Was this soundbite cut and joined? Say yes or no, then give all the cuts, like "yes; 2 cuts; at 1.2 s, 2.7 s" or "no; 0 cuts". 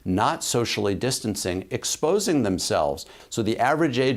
yes; 1 cut; at 3.1 s